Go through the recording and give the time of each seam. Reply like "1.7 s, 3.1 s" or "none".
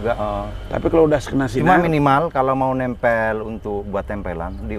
none